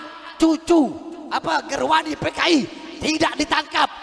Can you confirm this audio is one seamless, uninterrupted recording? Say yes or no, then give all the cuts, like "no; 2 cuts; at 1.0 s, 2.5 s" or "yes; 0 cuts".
yes; 0 cuts